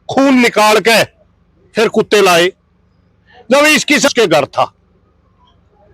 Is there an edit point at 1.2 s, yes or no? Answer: no